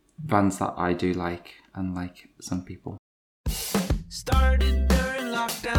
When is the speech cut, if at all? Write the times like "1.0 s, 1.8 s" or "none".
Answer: 3.0 s